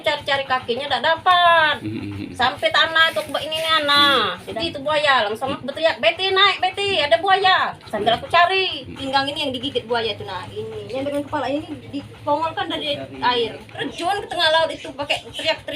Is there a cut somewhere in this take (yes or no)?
yes